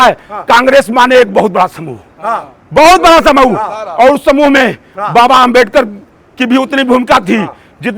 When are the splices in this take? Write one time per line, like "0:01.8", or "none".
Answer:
none

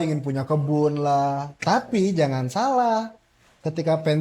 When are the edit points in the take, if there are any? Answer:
0:01.5

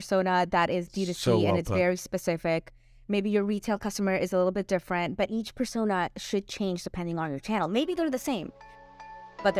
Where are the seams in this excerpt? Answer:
none

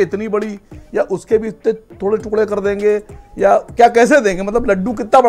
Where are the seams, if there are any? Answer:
none

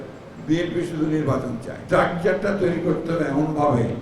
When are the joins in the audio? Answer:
0:01.7

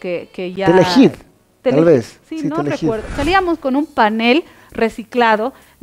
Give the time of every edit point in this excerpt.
0:03.1

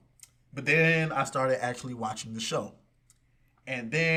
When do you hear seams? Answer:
none

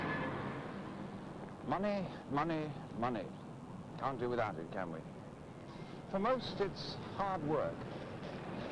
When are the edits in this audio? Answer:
0:01.8

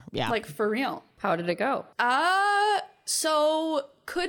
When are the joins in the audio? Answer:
0:01.1
0:01.9

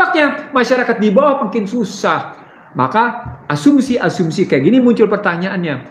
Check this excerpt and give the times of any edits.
none

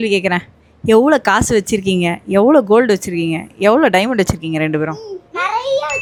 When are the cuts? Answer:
none

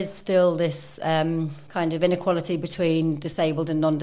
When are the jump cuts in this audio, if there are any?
0:01.6

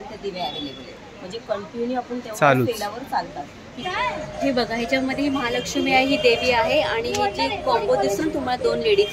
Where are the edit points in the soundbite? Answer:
0:03.8

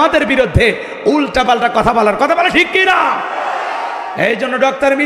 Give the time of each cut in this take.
none

